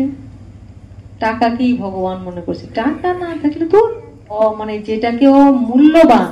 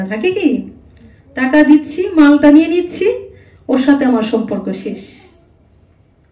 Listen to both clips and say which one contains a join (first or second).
first